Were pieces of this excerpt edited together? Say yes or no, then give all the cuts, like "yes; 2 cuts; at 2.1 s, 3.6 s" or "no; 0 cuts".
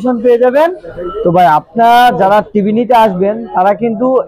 no; 0 cuts